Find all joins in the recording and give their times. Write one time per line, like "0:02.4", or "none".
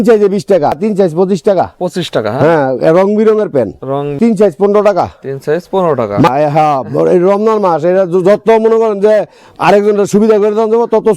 0:00.8
0:04.2
0:06.3